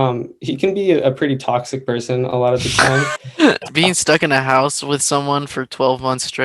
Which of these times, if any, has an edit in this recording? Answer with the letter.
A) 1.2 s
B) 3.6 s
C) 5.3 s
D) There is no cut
B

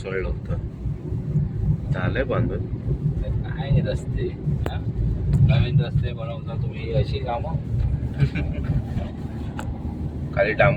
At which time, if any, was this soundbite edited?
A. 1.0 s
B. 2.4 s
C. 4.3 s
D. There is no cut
D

